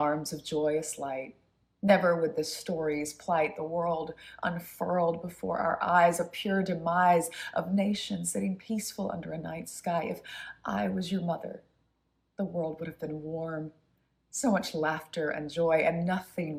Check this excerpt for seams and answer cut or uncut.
uncut